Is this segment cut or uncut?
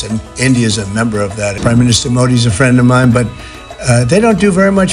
cut